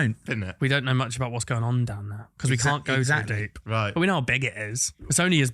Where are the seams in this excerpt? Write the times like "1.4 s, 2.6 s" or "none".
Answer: none